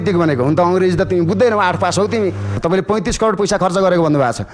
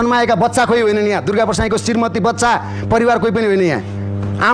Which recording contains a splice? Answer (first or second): first